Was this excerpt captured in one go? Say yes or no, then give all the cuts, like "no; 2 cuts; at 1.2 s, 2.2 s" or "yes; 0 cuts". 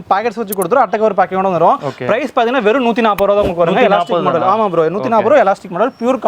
yes; 0 cuts